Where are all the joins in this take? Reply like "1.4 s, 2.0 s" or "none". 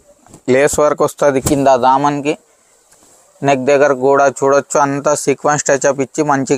none